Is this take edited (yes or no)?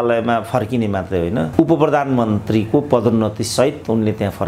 no